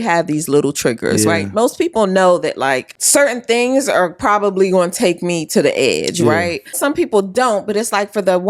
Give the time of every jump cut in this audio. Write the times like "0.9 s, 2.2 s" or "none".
2.9 s, 6.8 s